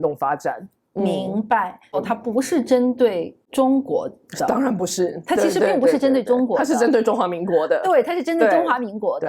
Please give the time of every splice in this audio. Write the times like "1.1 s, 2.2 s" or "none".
2.0 s, 3.4 s